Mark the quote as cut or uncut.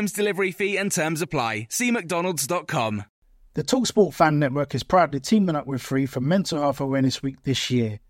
cut